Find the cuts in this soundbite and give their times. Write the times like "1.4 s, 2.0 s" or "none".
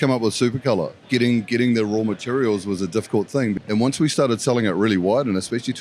1.0 s, 3.6 s